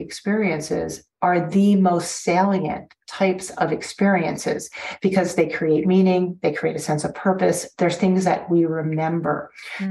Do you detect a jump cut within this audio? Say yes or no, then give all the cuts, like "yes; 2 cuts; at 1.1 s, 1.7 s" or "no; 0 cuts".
no; 0 cuts